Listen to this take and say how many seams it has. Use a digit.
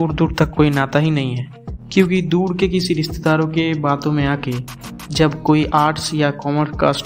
0